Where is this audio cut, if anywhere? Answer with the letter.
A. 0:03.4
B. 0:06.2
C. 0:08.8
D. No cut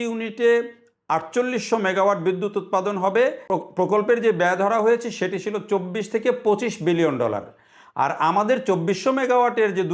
A